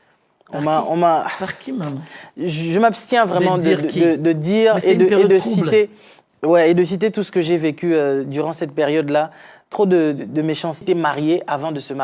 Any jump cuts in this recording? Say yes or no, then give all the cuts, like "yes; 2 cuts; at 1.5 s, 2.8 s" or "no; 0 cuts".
yes; 1 cut; at 10.8 s